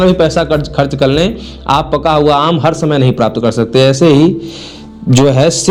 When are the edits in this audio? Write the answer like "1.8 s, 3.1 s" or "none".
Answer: none